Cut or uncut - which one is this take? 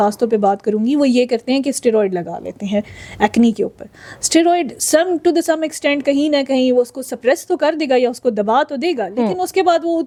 uncut